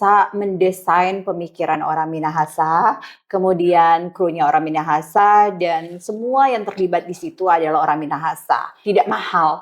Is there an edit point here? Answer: yes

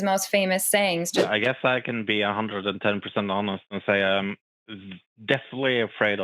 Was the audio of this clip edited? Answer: yes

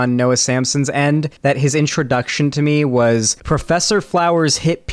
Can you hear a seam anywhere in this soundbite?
yes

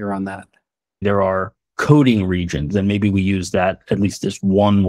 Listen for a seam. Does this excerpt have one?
yes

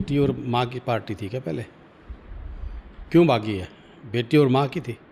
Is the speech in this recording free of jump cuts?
yes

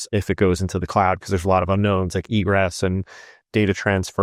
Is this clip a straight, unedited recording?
yes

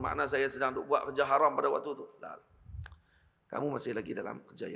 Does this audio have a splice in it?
no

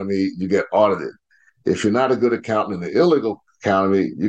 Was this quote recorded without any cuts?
yes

